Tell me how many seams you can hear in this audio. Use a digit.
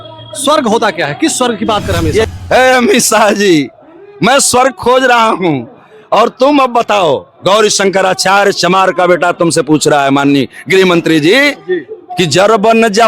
1